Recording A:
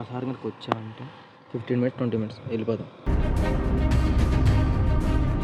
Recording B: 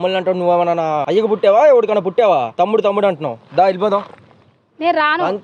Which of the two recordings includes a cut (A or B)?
B